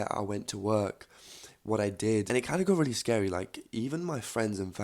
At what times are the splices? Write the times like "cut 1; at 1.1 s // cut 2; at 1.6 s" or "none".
cut 1; at 2.3 s

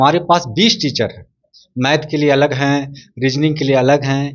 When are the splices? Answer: none

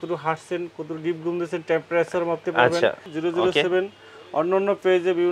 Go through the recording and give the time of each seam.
cut 1; at 3.1 s

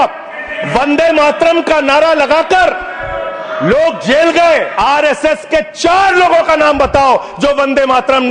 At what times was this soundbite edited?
cut 1; at 4.7 s

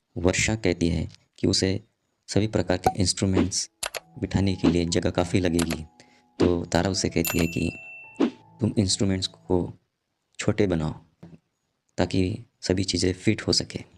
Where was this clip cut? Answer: none

